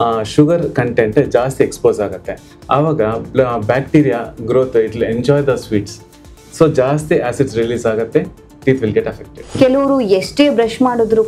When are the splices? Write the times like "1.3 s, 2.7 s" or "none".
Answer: 9.5 s